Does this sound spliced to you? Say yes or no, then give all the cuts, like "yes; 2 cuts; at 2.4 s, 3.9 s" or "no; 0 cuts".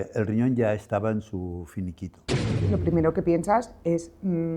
yes; 1 cut; at 2.6 s